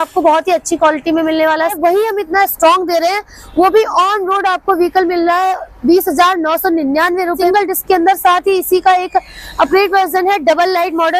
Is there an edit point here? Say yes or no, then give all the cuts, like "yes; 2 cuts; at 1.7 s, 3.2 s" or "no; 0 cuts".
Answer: yes; 2 cuts; at 1.7 s, 7.4 s